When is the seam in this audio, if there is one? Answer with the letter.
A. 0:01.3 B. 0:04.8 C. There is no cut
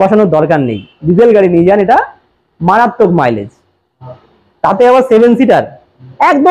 C